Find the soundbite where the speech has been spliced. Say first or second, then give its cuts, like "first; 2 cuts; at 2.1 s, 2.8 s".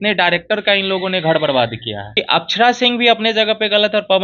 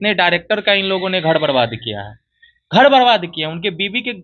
first; 1 cut; at 2.2 s